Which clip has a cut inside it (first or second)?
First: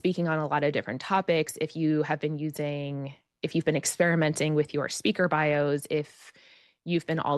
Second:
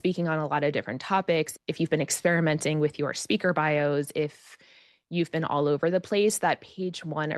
second